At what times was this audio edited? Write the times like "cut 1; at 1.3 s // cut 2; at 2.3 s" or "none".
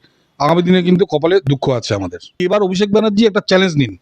cut 1; at 2.4 s